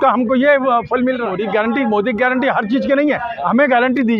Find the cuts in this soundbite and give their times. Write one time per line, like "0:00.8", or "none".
0:01.3